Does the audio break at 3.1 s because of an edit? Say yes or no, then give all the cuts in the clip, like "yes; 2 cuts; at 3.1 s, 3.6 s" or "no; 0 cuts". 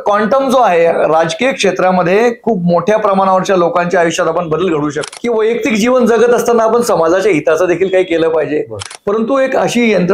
no; 2 cuts; at 5.0 s, 8.8 s